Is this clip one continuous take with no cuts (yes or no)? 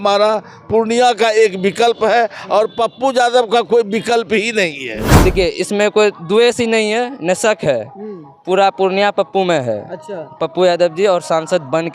no